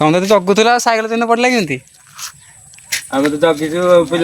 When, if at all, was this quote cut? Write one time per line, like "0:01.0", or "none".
none